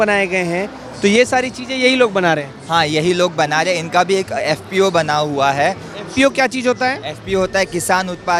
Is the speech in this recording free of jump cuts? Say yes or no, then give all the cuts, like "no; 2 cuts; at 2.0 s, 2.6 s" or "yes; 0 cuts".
yes; 0 cuts